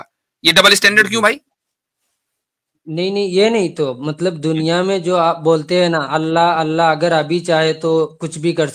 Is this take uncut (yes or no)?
yes